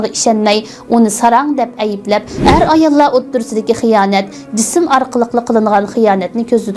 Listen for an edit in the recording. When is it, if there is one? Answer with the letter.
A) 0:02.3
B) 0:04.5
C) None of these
A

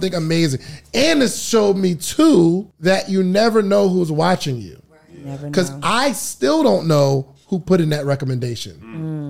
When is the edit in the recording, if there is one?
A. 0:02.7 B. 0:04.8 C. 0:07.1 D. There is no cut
A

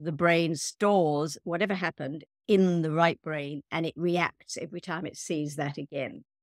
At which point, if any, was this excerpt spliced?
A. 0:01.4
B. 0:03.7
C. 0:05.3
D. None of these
A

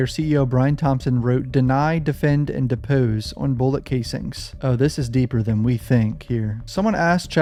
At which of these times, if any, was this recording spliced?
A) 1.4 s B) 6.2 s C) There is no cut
C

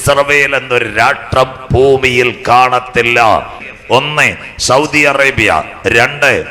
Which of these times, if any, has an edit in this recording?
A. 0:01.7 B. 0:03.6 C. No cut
B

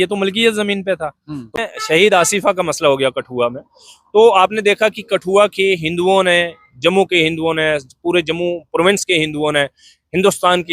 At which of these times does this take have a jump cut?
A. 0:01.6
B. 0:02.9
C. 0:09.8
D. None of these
A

